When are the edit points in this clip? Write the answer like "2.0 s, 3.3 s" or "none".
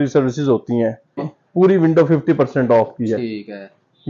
1.3 s